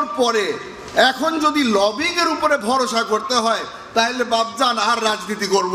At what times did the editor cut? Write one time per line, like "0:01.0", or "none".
none